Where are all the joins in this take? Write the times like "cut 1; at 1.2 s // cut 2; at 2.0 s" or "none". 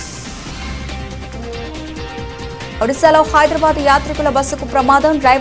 cut 1; at 0.9 s